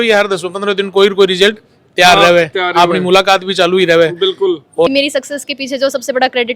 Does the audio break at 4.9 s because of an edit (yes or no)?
yes